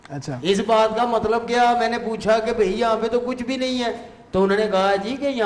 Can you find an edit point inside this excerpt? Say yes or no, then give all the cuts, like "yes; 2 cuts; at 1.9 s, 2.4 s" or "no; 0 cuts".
no; 0 cuts